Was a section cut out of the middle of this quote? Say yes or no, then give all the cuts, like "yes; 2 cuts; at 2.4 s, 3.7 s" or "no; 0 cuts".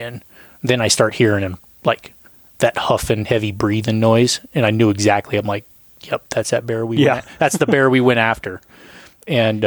no; 0 cuts